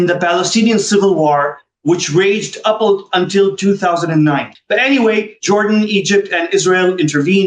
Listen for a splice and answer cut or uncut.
cut